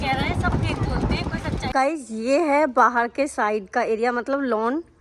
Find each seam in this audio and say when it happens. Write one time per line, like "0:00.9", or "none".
0:01.7

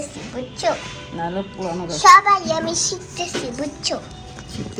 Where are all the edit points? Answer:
none

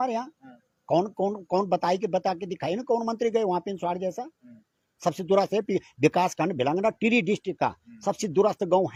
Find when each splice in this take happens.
none

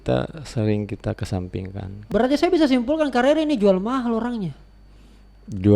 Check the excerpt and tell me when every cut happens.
0:02.0

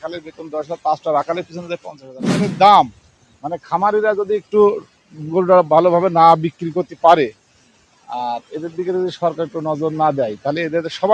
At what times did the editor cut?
0:02.5

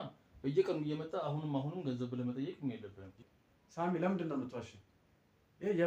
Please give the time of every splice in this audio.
0:03.2

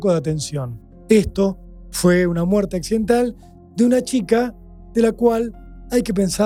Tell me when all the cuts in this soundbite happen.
none

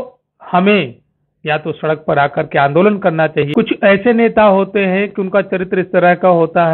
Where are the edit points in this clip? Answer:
0:03.5

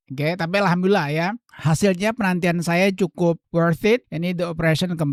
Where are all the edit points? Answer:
none

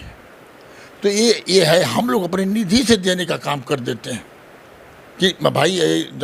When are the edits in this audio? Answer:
none

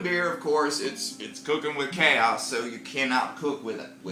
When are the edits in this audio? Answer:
none

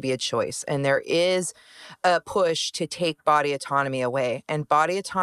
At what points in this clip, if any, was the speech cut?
none

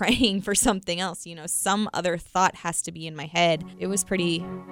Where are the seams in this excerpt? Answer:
0:03.7

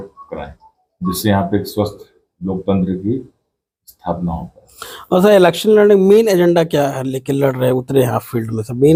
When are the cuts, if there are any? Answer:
none

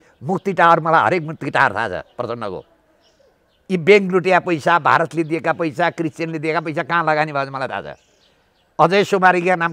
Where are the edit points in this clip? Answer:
none

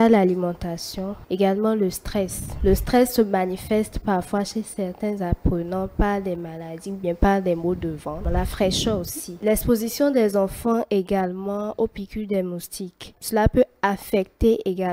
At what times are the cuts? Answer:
0:01.2
0:02.4
0:08.2
0:09.4

